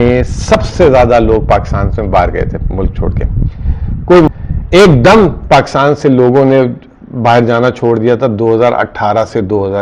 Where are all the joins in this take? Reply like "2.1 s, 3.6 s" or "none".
4.3 s